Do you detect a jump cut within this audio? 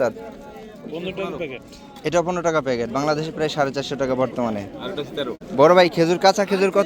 yes; 1 cut; at 5.4 s

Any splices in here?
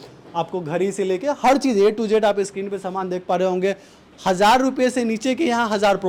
no; 0 cuts

